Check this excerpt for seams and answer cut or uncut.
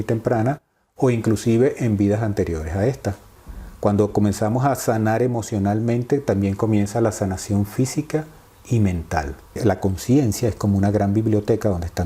cut